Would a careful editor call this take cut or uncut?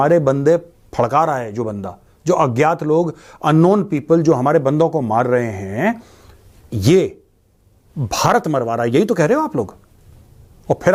uncut